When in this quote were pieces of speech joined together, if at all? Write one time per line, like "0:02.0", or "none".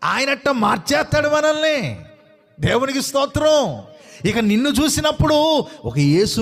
none